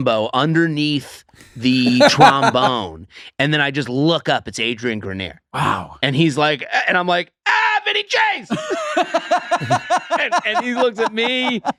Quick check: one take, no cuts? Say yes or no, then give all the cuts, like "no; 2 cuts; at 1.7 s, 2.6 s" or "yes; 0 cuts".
yes; 0 cuts